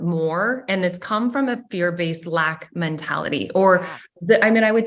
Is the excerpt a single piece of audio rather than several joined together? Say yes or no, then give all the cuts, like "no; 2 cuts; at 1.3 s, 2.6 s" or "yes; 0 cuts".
yes; 0 cuts